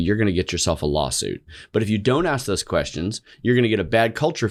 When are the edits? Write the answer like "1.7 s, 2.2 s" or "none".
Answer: none